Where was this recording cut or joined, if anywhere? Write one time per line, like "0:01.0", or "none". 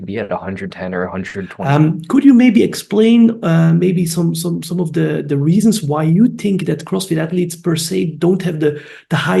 0:01.5